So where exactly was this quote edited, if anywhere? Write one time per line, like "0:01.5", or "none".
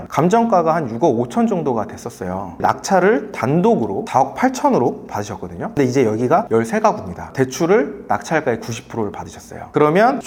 none